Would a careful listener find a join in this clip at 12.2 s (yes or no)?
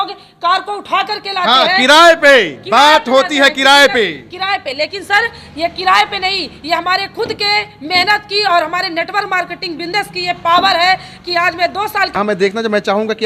yes